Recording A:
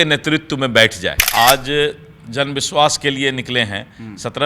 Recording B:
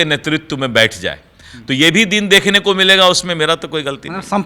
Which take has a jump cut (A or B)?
A